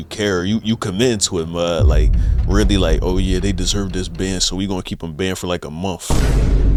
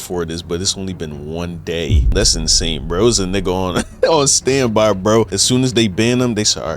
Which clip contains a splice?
second; 2 cuts; at 2.1 s, 5.4 s

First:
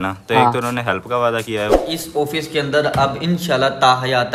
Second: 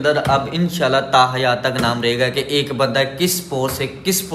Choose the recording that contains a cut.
first; 1 cut; at 1.8 s

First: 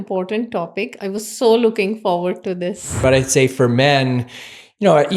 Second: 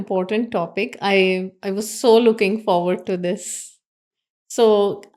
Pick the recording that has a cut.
first; 2 cuts; at 0.9 s, 3.0 s

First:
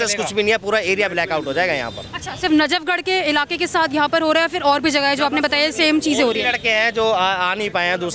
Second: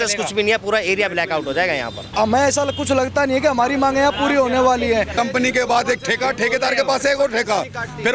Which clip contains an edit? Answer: second; 2 cuts; at 2.0 s, 5.1 s

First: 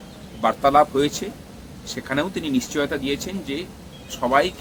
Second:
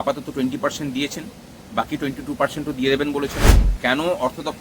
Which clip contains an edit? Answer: second; 1 cut; at 3.4 s

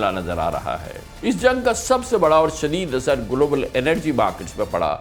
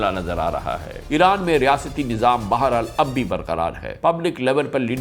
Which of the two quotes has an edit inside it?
second; 2 cuts; at 0.9 s, 3.9 s

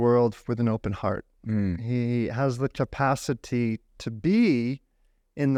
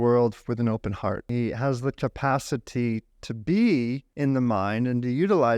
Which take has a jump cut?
second; 2 cuts; at 1.3 s, 4.0 s

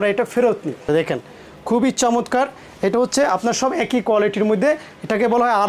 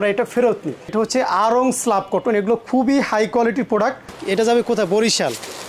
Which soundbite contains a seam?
second; 2 cuts; at 0.9 s, 4.1 s

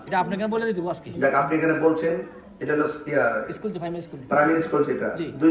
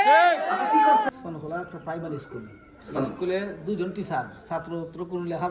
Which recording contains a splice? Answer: second; 1 cut; at 1.1 s

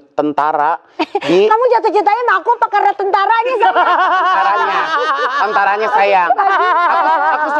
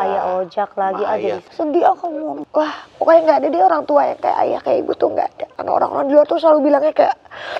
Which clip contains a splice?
second; 3 cuts; at 1.4 s, 2.4 s, 5.5 s

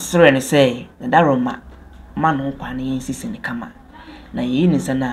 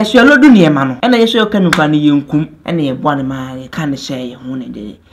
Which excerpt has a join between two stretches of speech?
second; 3 cuts; at 0.9 s, 2.6 s, 3.6 s

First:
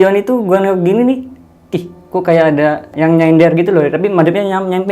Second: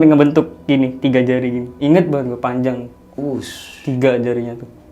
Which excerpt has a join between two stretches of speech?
first; 1 cut; at 2.9 s

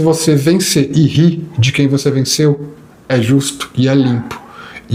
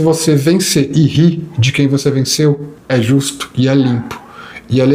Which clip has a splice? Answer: second; 1 cut; at 2.7 s

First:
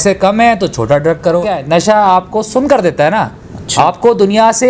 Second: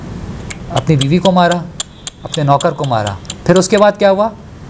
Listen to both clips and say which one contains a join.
first; 1 cut; at 1.6 s

